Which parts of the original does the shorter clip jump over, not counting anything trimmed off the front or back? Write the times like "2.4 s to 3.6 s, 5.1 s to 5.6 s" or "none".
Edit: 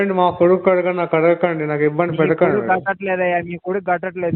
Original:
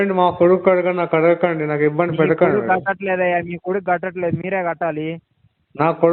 none